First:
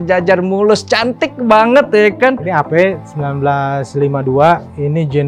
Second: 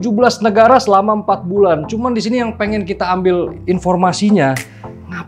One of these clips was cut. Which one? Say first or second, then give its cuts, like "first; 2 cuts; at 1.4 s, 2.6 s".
first; 1 cut; at 2.4 s